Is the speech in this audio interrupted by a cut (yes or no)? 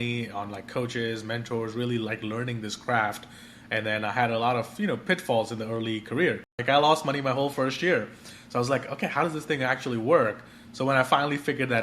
yes